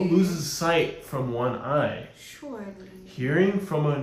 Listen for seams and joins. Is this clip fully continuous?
yes; 0 cuts

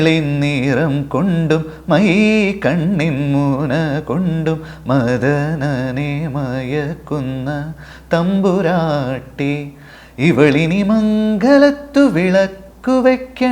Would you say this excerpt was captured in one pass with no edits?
yes; 0 cuts

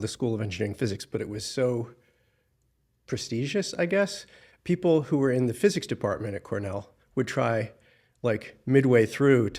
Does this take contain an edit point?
no; 0 cuts

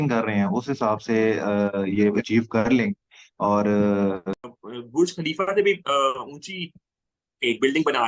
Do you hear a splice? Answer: yes; 1 cut; at 4.3 s

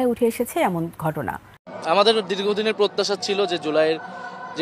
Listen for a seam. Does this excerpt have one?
yes; 1 cut; at 1.7 s

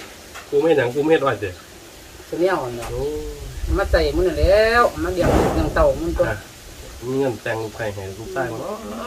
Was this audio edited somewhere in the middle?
no; 0 cuts

